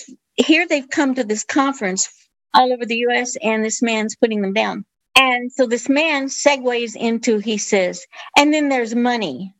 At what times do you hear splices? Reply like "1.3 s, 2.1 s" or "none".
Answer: 2.2 s